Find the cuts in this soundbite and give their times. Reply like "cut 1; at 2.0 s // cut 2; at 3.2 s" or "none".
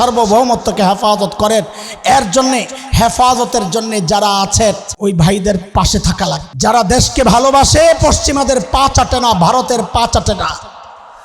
cut 1; at 4.9 s // cut 2; at 6.5 s